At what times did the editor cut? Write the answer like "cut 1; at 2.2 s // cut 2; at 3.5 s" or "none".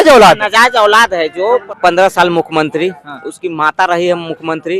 cut 1; at 1.7 s

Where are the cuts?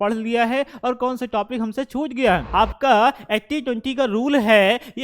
cut 1; at 2.5 s

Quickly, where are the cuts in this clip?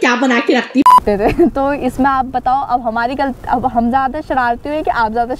cut 1; at 1.0 s

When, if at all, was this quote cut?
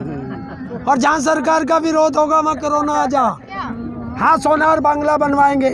cut 1; at 3.6 s

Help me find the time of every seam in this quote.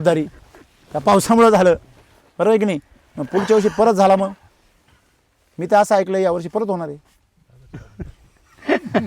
none

